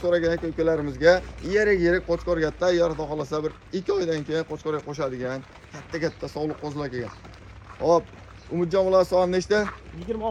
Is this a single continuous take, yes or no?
yes